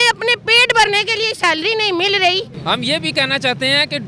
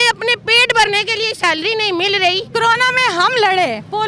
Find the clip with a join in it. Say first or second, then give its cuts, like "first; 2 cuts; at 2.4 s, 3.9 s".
second; 1 cut; at 2.5 s